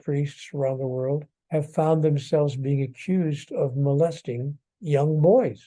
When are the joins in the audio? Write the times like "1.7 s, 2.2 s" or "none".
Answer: 1.3 s